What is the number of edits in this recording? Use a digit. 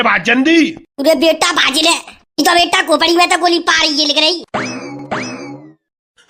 1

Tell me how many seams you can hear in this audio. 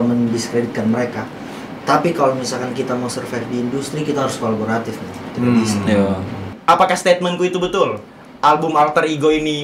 1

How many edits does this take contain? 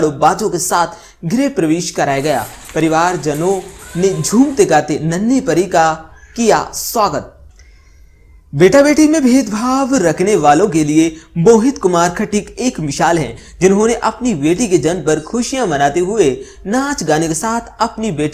0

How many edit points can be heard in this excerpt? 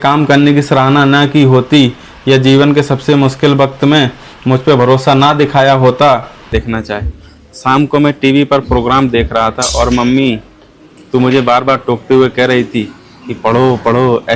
1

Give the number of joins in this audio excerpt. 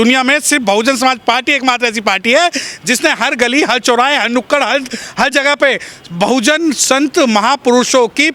0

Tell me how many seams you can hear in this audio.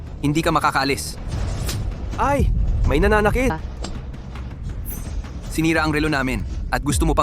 1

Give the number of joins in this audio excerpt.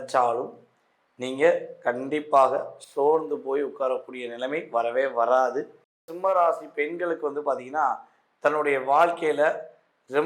1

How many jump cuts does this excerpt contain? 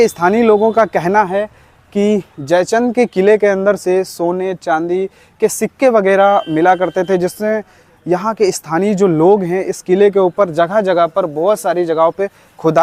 0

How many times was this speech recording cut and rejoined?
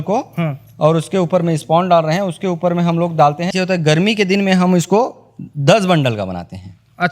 1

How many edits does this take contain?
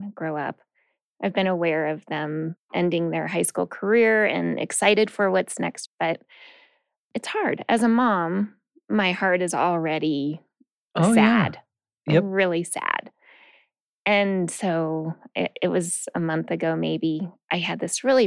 1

